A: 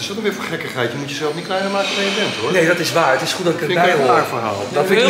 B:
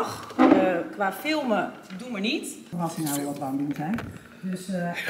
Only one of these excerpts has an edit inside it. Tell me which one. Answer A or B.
B